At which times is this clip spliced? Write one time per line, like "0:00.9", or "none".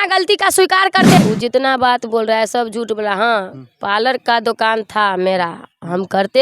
0:01.2